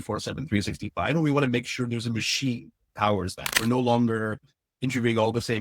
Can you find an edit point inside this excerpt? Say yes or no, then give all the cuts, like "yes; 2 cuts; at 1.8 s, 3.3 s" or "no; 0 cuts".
yes; 1 cut; at 3.4 s